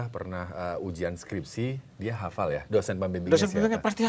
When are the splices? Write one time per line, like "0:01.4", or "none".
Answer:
0:02.6